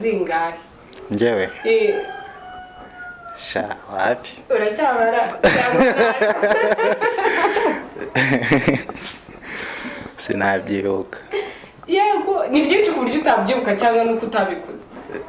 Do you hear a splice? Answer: no; 0 cuts

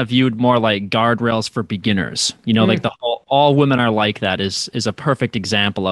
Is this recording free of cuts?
yes; 0 cuts

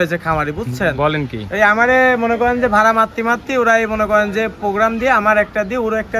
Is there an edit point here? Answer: no; 0 cuts

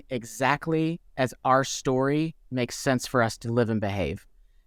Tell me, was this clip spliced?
no; 0 cuts

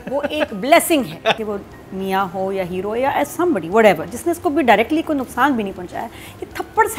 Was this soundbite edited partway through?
yes; 1 cut; at 1.4 s

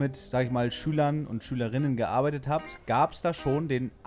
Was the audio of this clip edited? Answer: no; 0 cuts

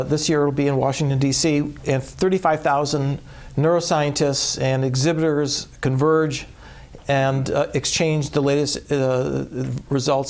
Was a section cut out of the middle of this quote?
yes; 1 cut; at 1.0 s

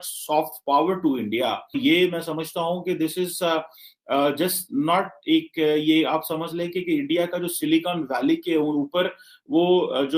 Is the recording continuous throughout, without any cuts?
no; 1 cut; at 1.8 s

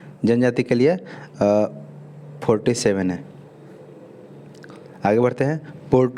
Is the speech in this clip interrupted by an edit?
yes; 1 cut; at 5.0 s

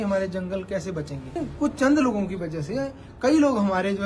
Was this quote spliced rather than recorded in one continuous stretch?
yes; 1 cut; at 1.4 s

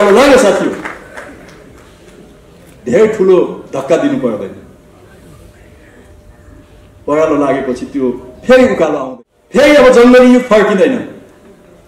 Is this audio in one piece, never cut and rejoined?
no; 1 cut; at 9.0 s

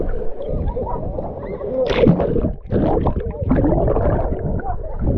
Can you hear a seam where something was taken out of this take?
no; 0 cuts

